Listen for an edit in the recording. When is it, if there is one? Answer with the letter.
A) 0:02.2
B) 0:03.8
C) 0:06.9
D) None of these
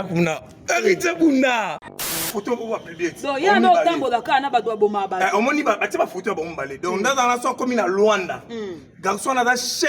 A